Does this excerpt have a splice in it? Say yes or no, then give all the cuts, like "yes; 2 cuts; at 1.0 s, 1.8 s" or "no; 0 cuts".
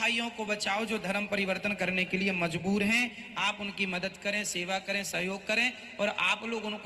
no; 0 cuts